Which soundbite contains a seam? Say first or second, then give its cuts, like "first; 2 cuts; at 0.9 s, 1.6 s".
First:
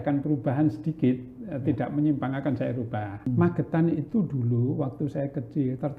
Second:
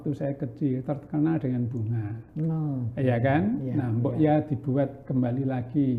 first; 1 cut; at 3.3 s